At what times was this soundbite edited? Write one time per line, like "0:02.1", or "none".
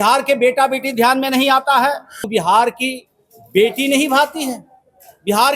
0:02.3